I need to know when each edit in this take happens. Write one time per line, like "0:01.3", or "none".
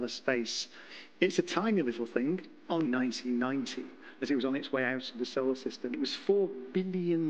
0:02.9
0:06.0